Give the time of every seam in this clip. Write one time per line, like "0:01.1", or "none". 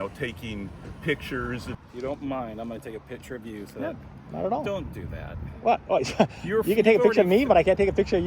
0:01.8